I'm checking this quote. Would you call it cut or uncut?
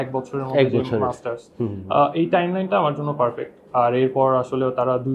uncut